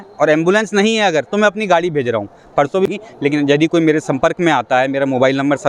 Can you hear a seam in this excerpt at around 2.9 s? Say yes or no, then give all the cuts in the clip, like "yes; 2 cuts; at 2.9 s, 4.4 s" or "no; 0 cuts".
yes; 1 cut; at 2.9 s